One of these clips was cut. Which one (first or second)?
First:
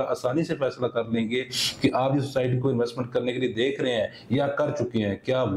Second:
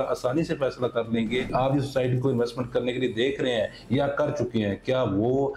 second